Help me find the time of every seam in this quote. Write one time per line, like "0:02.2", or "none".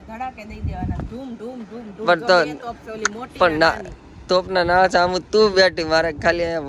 none